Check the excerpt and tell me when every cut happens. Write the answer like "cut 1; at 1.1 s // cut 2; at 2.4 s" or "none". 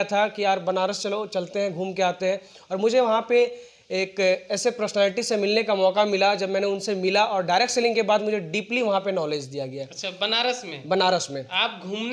none

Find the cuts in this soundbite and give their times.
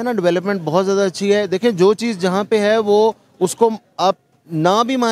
none

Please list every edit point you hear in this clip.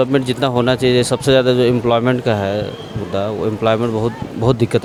none

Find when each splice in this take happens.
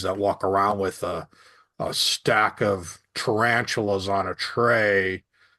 none

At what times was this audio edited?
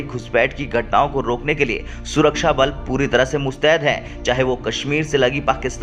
none

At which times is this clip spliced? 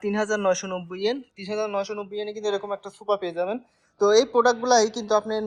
none

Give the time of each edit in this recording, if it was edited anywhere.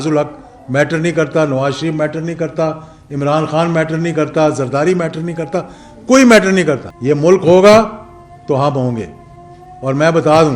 cut 1; at 6.9 s

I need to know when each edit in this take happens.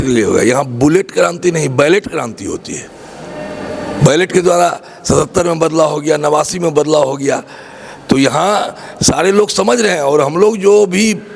none

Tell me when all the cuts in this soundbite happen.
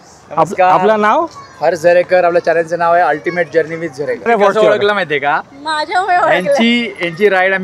cut 1; at 4.3 s

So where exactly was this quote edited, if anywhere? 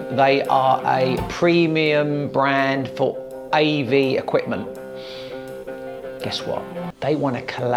none

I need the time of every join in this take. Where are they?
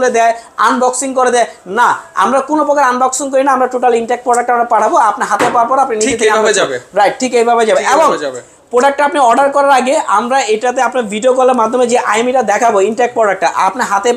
none

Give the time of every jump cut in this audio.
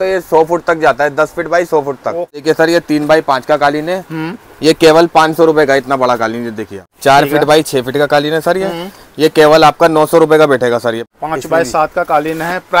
cut 1; at 2.4 s // cut 2; at 6.9 s // cut 3; at 11.1 s

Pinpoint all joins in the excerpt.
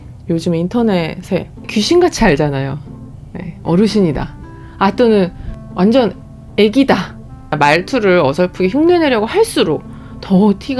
cut 1; at 1.6 s // cut 2; at 5.5 s // cut 3; at 7.5 s

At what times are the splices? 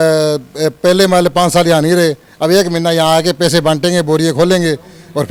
none

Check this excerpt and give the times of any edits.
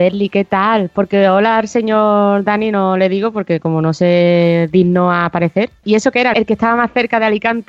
cut 1; at 5.9 s

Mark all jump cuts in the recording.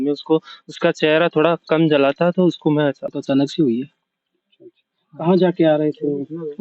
cut 1; at 3.0 s

